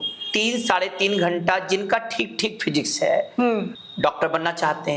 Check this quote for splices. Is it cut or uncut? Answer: cut